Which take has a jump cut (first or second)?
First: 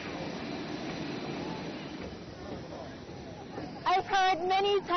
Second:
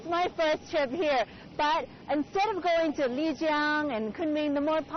second